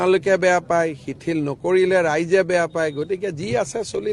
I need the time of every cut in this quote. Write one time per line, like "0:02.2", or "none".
none